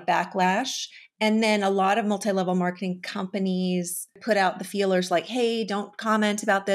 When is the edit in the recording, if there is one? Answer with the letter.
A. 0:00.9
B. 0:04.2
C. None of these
B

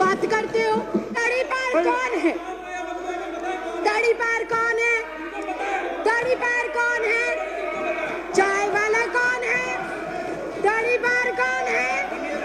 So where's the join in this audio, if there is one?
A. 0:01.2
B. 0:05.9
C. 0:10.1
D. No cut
A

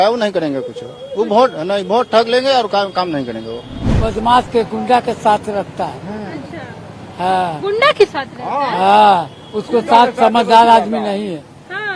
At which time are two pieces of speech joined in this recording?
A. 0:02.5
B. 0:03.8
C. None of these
B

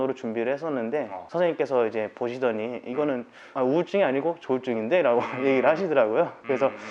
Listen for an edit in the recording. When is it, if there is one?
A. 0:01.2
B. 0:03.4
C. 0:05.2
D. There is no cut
A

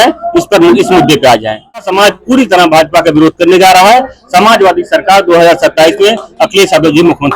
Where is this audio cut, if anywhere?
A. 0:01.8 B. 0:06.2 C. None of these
A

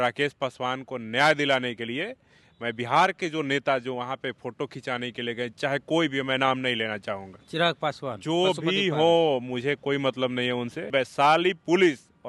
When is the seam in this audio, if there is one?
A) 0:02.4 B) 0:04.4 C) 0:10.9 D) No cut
C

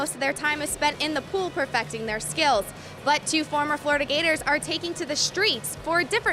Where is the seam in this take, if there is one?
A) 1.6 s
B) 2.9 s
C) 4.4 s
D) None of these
D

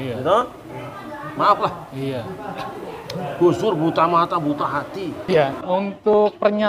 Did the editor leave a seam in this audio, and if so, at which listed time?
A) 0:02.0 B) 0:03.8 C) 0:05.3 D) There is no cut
C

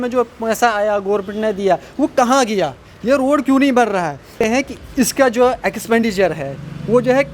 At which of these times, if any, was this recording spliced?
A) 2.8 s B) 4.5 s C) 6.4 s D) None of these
B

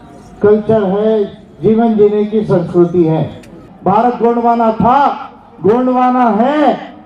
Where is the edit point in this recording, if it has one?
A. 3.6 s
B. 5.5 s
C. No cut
A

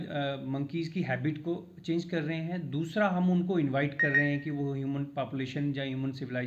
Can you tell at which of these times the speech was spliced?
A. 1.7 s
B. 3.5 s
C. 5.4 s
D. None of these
D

